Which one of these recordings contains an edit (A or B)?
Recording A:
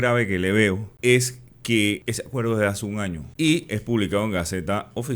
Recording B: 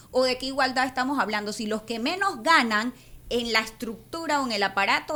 A